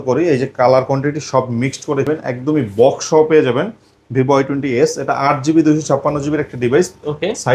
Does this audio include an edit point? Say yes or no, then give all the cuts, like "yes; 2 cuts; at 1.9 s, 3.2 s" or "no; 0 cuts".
yes; 1 cut; at 2.1 s